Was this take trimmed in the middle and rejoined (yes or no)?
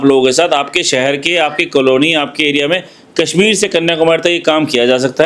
no